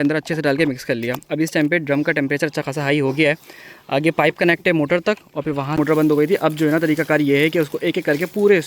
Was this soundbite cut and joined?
yes; 1 cut; at 5.7 s

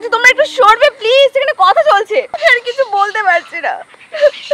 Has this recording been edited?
yes; 1 cut; at 2.3 s

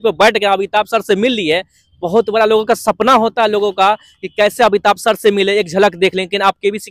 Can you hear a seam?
no; 0 cuts

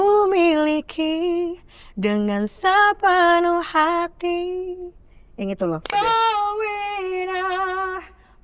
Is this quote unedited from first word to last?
no; 1 cut; at 5.9 s

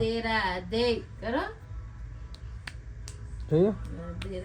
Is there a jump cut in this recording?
no; 0 cuts

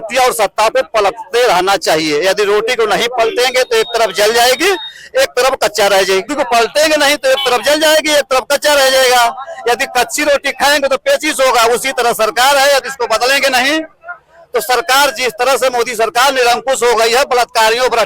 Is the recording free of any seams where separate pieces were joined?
no; 1 cut; at 6.3 s

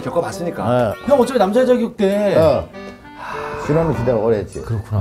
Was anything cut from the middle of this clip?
yes; 1 cut; at 1.0 s

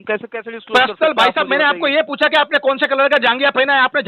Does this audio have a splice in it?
no; 0 cuts

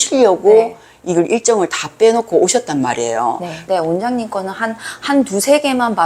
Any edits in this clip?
yes; 1 cut; at 3.6 s

